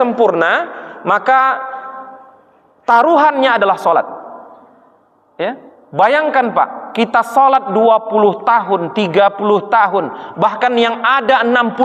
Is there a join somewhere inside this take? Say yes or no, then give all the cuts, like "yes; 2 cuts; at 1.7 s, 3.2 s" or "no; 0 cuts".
no; 0 cuts